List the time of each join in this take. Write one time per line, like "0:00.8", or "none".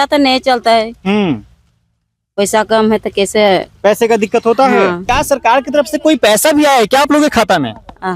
0:05.0